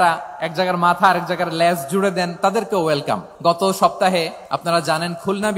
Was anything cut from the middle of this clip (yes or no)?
yes